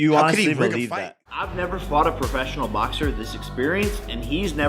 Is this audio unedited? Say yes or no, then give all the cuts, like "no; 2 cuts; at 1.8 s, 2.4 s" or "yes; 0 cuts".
no; 1 cut; at 0.9 s